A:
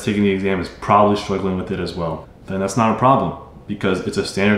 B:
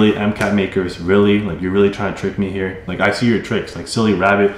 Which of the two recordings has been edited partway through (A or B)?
B